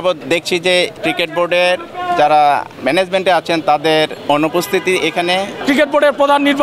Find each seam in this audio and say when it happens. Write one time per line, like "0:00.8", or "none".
0:00.7
0:02.7
0:04.2
0:05.5